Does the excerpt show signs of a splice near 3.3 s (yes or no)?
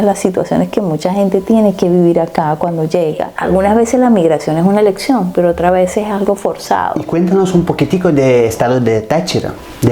yes